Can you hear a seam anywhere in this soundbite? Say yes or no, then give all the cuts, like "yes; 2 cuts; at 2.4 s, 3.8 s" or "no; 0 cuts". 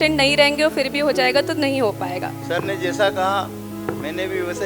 yes; 1 cut; at 2.3 s